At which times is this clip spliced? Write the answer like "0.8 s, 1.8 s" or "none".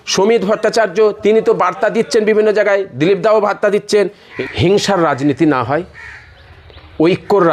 4.2 s